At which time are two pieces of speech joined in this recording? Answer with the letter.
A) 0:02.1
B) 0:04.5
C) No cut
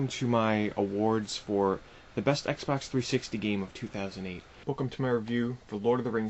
B